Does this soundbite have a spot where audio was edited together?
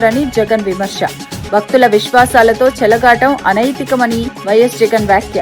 no; 0 cuts

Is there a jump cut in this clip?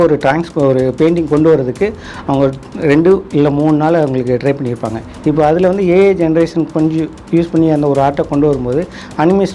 no; 0 cuts

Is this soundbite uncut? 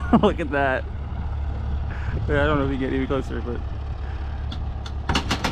yes; 0 cuts

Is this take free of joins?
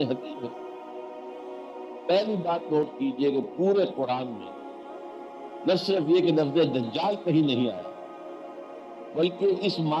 yes; 0 cuts

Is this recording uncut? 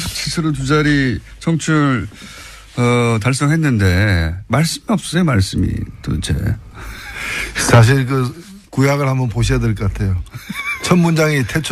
yes; 0 cuts

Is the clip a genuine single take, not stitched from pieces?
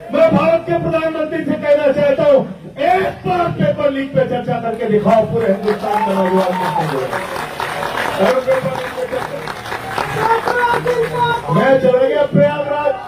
yes; 0 cuts

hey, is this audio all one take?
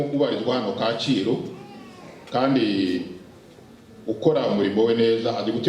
yes; 0 cuts

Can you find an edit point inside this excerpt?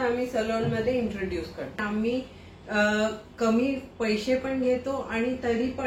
yes; 1 cut; at 1.8 s

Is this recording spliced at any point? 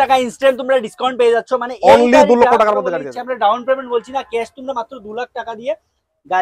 yes; 1 cut; at 2.9 s

